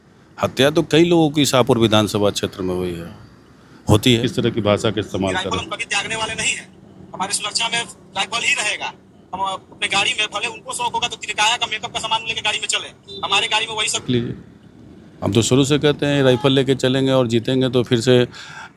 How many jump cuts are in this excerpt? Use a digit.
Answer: 2